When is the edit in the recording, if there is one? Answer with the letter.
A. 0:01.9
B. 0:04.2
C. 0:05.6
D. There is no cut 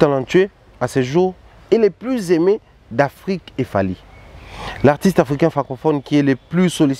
D